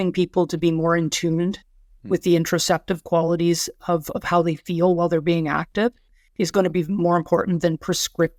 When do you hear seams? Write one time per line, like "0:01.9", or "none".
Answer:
none